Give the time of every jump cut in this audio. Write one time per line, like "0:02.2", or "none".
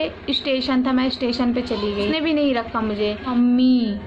0:02.1
0:03.3